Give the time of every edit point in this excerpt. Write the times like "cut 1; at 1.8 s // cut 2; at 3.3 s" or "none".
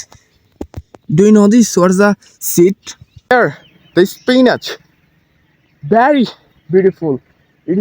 cut 1; at 3.3 s

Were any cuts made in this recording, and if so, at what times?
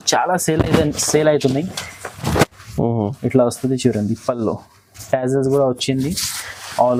none

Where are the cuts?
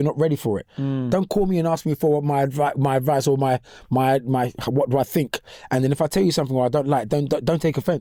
none

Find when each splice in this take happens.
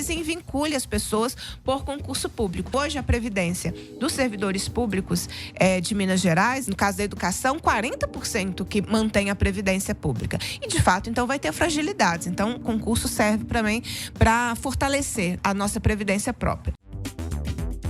cut 1; at 2.7 s // cut 2; at 15.4 s // cut 3; at 17.0 s

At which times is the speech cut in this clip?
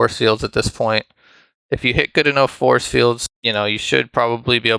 cut 1; at 3.3 s

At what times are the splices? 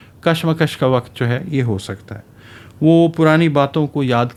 none

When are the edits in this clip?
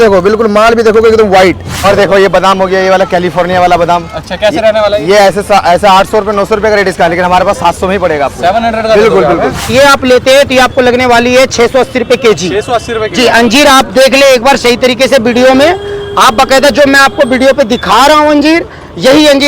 cut 1; at 1.8 s // cut 2; at 9.7 s

